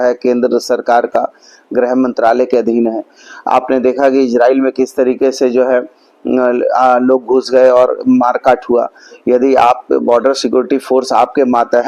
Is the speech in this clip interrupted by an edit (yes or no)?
no